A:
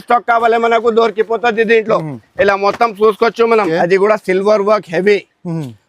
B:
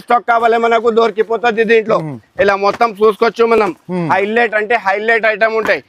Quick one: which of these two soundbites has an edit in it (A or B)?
A